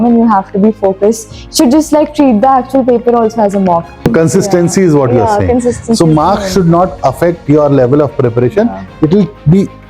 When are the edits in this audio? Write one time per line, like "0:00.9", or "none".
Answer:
0:04.1